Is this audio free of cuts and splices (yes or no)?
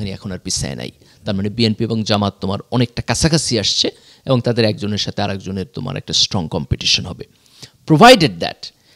yes